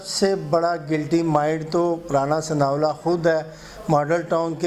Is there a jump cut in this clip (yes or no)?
no